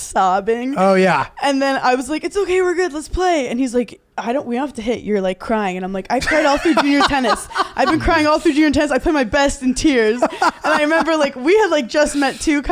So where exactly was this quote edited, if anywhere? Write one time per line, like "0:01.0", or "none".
none